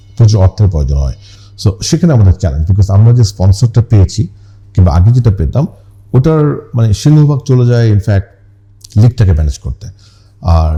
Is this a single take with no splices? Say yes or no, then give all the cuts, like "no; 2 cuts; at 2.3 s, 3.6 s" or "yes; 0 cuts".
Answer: yes; 0 cuts